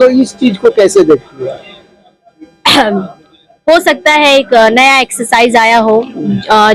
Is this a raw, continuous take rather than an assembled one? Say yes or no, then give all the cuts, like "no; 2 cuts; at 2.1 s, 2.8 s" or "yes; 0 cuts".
yes; 0 cuts